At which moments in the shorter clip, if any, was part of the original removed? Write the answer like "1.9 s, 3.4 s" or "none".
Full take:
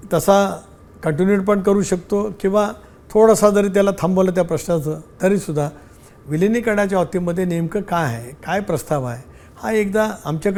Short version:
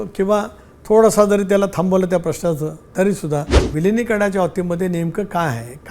3.6 s